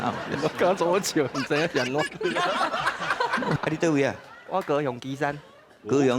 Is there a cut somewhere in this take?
yes; 1 cut; at 3.6 s

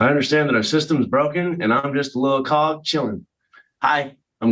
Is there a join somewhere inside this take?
no; 0 cuts

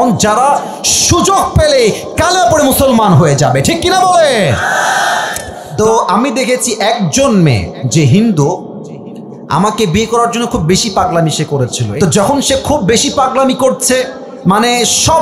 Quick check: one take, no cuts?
no; 2 cuts; at 5.6 s, 11.8 s

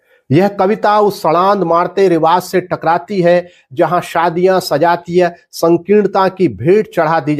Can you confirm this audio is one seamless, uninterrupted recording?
yes; 0 cuts

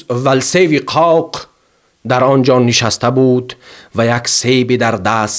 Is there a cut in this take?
no; 0 cuts

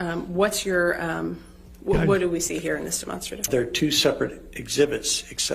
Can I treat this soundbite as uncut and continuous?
no; 1 cut; at 3.5 s

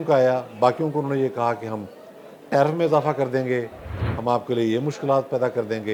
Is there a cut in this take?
no; 0 cuts

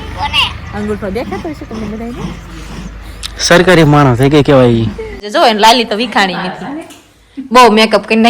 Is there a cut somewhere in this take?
yes; 1 cut; at 5.3 s

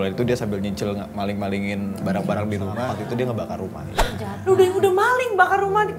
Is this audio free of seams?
no; 2 cuts; at 2.9 s, 4.1 s

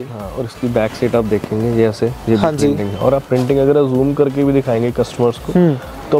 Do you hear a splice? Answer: no; 0 cuts

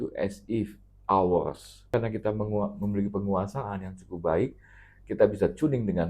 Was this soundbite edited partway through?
yes; 1 cut; at 1.9 s

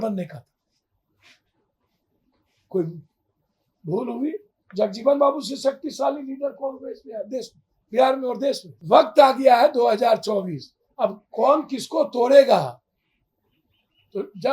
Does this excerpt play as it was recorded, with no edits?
no; 1 cut; at 8.7 s

